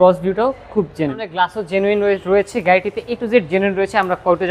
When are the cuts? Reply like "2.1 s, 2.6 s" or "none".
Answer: 1.1 s